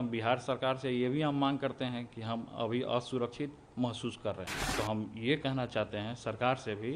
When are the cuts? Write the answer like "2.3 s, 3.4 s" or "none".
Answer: 4.6 s